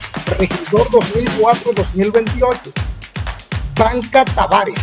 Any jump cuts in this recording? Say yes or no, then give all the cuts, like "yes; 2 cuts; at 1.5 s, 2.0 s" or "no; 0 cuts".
no; 0 cuts